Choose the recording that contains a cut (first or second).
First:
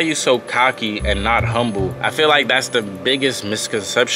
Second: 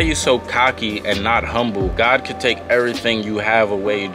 first